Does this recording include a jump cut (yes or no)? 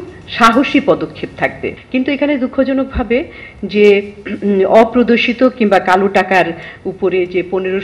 yes